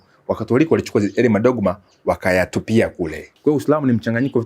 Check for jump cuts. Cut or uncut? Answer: cut